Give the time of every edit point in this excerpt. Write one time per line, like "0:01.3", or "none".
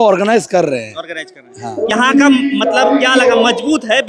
none